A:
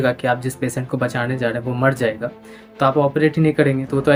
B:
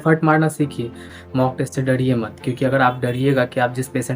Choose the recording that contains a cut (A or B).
B